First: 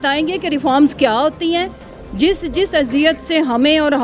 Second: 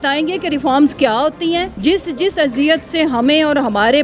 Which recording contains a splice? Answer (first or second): second